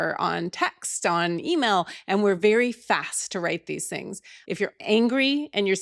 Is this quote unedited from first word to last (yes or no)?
no